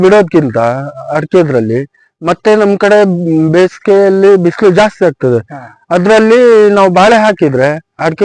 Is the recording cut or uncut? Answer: uncut